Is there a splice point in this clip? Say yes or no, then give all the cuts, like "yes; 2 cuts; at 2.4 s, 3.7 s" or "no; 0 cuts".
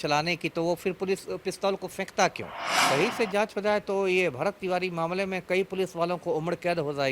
yes; 1 cut; at 2.8 s